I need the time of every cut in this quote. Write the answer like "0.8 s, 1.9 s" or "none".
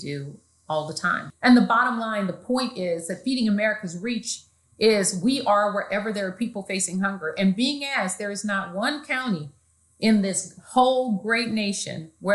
1.2 s